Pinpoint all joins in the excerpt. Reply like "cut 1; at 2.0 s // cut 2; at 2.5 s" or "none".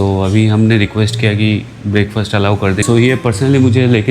cut 1; at 2.8 s